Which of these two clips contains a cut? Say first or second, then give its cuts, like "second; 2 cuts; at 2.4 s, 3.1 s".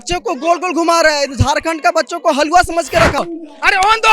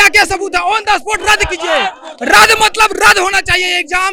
first; 1 cut; at 3.2 s